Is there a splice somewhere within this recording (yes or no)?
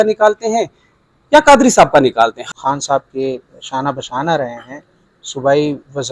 yes